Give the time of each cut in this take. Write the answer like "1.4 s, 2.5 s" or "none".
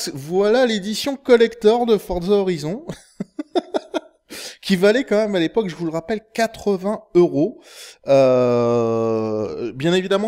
3.7 s